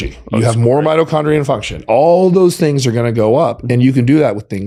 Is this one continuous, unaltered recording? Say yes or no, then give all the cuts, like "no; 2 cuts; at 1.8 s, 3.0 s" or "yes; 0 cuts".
yes; 0 cuts